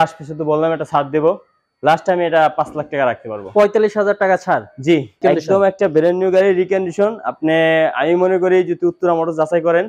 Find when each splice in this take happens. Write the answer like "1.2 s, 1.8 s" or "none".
5.2 s